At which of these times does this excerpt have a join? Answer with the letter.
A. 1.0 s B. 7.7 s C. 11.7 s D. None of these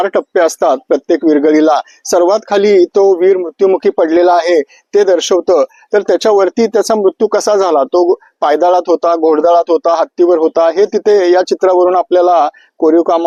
D